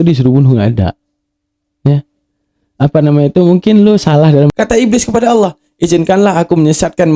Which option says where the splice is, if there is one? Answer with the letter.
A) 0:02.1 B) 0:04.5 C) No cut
B